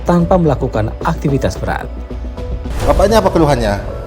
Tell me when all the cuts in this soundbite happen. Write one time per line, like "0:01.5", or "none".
0:02.7